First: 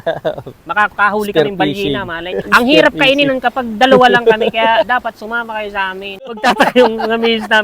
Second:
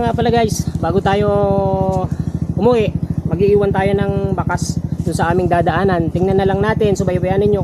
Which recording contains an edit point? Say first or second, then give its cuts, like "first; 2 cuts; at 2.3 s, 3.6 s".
first; 2 cuts; at 2.5 s, 6.4 s